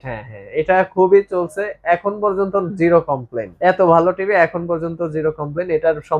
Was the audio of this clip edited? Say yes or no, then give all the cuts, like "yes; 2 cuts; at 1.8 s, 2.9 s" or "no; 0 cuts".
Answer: yes; 1 cut; at 3.5 s